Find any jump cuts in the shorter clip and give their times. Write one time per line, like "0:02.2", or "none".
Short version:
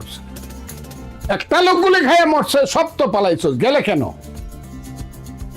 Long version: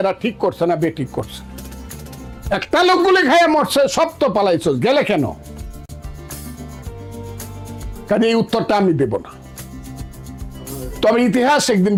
0:04.6